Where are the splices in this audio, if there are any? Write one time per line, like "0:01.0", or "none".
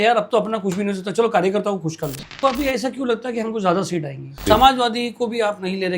0:02.4
0:04.4